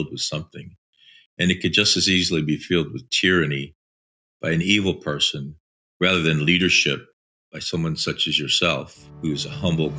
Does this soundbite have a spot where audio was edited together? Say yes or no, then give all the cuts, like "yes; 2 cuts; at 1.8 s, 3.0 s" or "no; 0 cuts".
yes; 1 cut; at 9.0 s